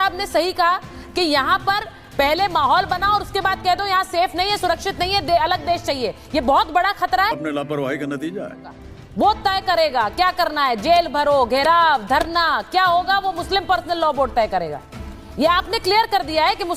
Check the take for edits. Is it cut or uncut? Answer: cut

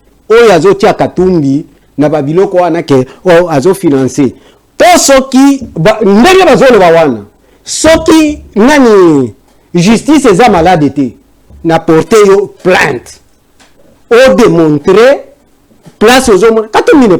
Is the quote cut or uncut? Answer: uncut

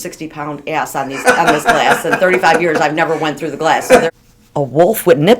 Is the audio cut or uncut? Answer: cut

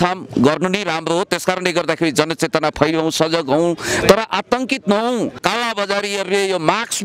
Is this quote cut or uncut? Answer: cut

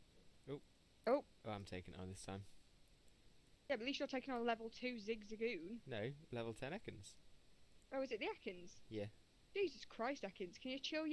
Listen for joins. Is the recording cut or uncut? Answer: uncut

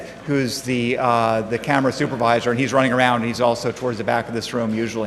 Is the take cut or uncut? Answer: uncut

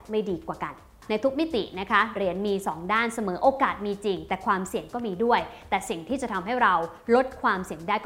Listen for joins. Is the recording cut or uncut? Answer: cut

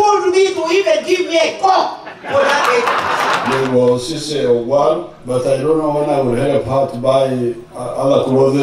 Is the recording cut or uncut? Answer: cut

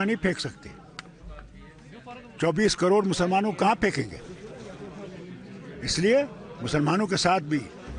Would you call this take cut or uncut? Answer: uncut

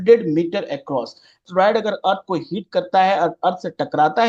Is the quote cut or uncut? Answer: cut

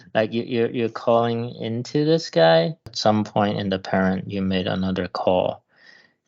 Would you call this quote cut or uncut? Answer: cut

